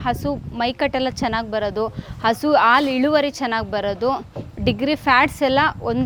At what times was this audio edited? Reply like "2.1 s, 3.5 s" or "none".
none